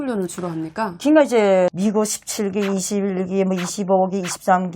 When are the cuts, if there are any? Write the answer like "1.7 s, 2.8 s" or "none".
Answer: 0.9 s, 1.7 s